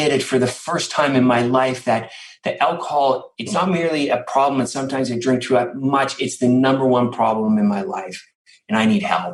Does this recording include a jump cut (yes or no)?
no